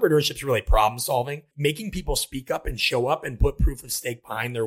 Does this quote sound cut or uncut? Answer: cut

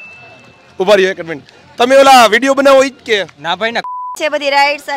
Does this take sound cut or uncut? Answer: cut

